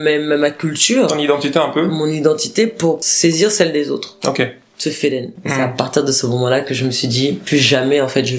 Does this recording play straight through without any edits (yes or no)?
no